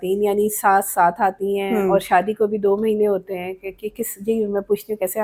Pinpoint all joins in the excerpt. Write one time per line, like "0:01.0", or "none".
none